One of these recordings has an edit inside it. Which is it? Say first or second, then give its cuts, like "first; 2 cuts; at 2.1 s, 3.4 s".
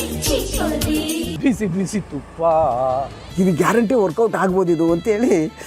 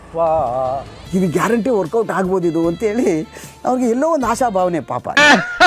first; 1 cut; at 1.3 s